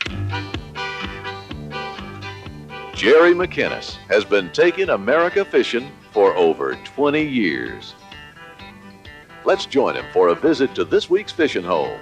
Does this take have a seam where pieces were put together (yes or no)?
yes